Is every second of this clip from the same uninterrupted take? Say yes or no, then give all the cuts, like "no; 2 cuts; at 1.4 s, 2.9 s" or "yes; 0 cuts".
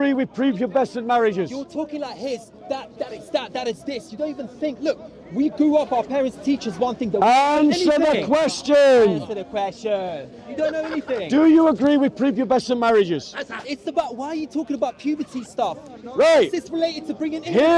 yes; 0 cuts